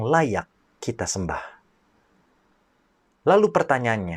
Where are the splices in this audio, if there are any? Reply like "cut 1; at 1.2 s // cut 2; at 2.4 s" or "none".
none